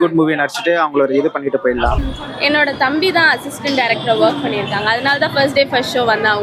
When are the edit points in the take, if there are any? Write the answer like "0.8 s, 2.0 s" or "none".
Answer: 2.1 s

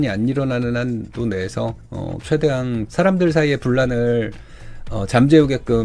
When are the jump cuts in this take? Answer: none

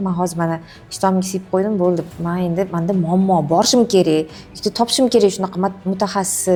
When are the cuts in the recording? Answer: none

